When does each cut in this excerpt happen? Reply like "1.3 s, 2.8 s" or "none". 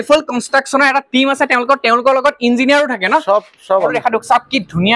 3.8 s